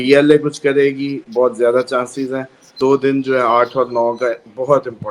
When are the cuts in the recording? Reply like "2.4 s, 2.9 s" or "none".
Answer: 2.8 s

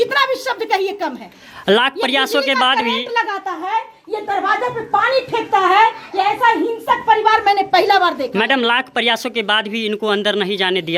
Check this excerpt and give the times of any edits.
none

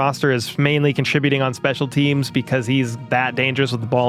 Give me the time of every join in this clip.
none

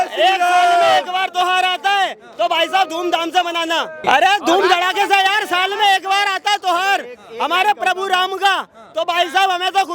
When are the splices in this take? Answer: 4.0 s

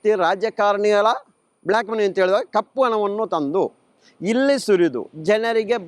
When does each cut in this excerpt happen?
none

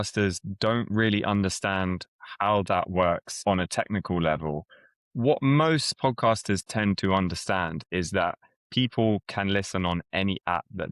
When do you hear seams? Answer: 3.4 s

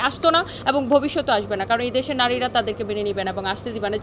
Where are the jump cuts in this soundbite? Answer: none

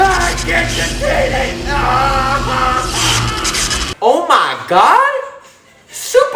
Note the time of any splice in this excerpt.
3.8 s

